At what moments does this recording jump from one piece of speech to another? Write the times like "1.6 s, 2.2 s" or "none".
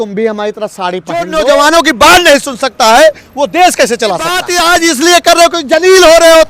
1.3 s, 4.5 s